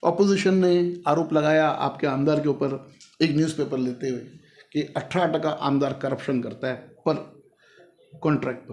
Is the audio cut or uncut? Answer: uncut